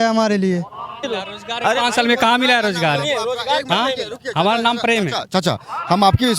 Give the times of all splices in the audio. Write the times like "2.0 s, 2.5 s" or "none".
1.1 s